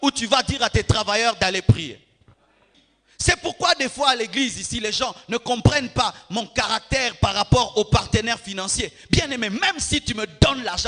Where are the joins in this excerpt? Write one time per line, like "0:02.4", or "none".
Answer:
0:02.7